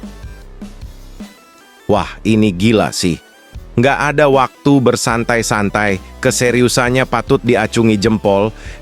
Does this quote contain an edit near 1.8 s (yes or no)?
yes